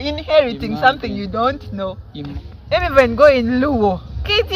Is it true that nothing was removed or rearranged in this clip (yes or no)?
no